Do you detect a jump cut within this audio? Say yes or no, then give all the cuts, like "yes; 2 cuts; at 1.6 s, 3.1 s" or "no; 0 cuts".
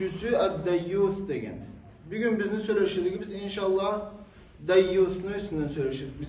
no; 0 cuts